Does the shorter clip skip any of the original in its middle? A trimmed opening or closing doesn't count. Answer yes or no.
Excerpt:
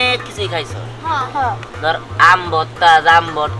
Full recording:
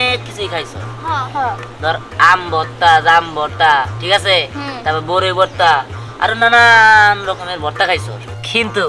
no